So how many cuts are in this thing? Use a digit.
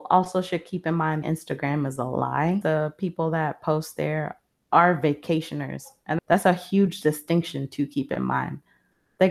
2